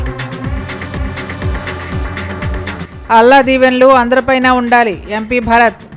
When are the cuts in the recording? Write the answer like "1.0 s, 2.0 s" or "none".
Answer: 1.0 s